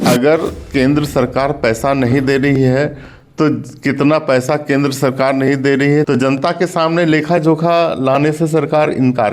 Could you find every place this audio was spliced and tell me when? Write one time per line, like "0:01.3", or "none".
0:06.1